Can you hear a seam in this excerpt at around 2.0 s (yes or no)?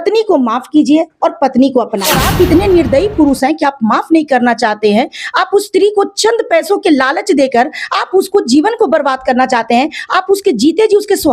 yes